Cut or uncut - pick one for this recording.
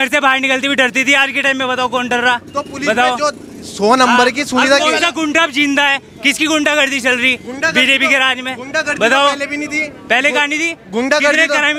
uncut